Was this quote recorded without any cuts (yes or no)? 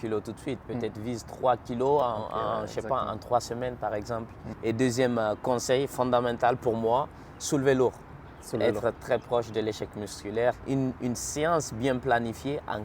no